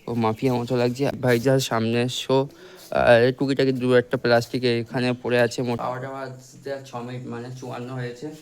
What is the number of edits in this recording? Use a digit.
2